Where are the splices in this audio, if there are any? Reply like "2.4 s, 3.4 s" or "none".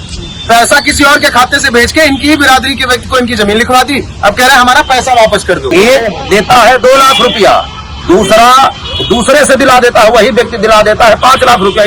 5.7 s